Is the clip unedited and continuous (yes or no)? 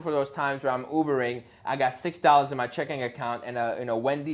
yes